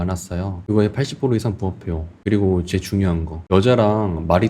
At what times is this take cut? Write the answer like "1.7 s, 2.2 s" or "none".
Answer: 2.1 s, 3.3 s

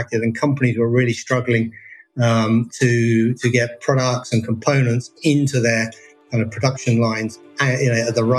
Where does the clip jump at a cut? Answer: none

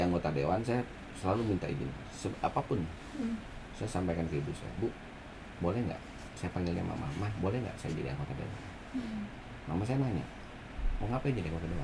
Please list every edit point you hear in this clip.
none

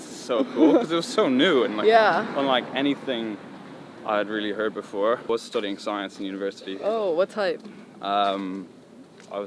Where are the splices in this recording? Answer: 5.3 s

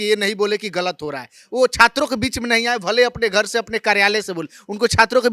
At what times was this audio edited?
none

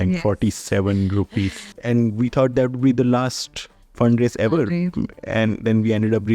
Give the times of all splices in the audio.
1.7 s

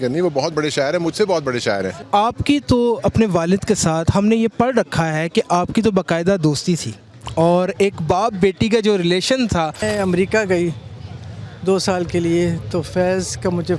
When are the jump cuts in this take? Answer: 2.0 s, 9.8 s

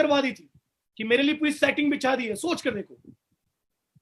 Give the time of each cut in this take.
none

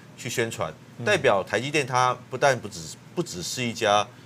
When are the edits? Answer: none

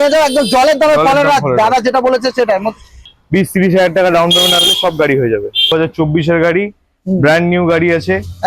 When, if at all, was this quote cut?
3.0 s, 5.7 s

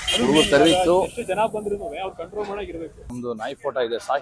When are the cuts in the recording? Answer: 3.1 s

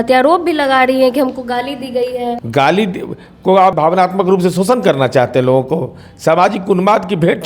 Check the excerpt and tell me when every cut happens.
2.4 s, 3.7 s

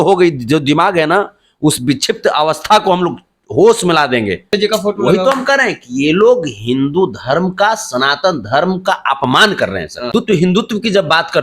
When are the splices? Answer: 4.5 s, 10.1 s

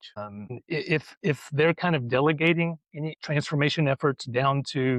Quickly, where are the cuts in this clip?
none

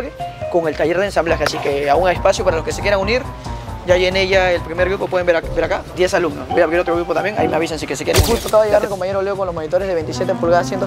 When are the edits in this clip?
5.9 s, 8.2 s

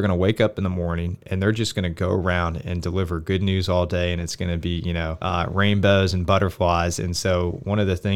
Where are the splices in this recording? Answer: 5.2 s

